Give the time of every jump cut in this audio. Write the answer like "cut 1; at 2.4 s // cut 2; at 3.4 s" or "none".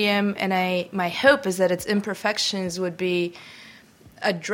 none